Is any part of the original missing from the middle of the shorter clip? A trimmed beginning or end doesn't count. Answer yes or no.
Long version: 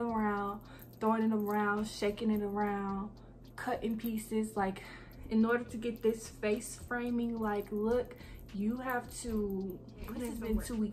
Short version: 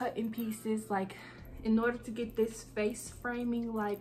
no